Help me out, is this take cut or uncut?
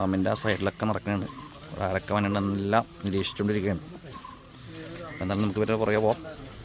uncut